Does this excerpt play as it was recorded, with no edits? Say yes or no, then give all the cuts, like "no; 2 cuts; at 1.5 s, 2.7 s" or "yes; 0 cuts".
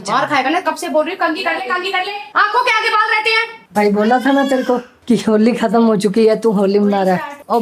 yes; 0 cuts